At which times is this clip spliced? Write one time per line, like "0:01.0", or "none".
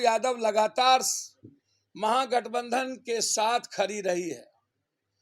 none